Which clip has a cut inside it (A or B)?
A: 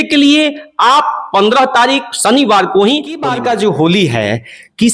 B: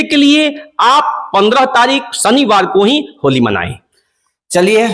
A